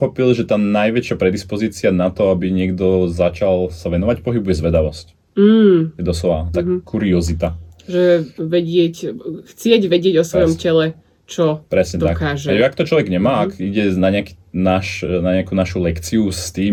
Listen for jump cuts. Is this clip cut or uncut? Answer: uncut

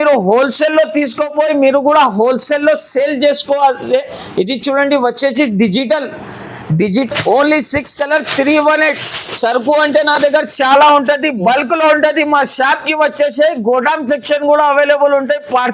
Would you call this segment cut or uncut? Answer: cut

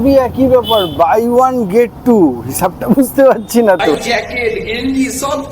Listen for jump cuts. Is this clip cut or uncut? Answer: cut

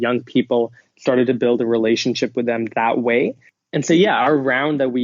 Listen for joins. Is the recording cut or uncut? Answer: cut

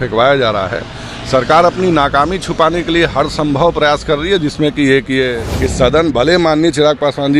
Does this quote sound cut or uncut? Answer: cut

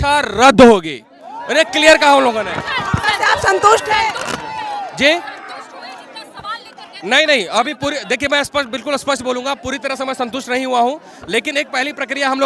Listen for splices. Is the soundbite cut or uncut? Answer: uncut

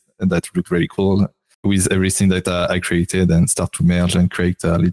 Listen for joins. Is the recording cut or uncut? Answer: cut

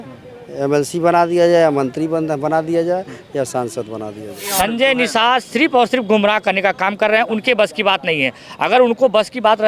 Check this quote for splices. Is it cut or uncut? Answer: cut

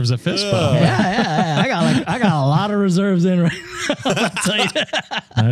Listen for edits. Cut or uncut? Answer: uncut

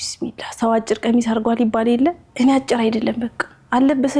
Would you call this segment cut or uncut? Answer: uncut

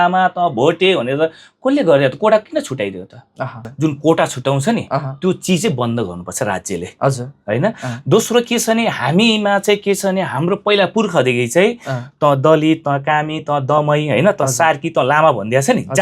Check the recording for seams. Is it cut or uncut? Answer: cut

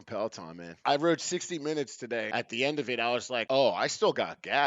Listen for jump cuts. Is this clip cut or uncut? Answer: cut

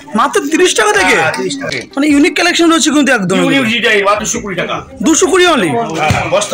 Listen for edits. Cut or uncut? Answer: cut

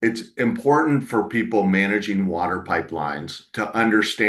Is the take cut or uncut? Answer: uncut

